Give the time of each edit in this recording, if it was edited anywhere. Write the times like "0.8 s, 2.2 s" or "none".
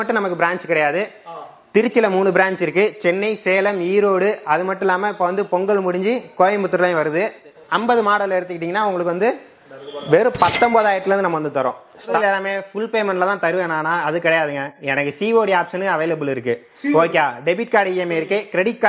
7.6 s, 12.1 s